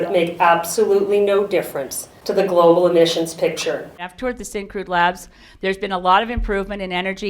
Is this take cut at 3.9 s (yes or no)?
yes